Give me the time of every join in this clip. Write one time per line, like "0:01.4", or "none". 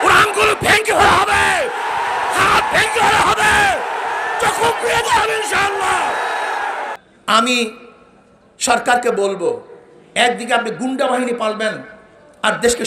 0:06.9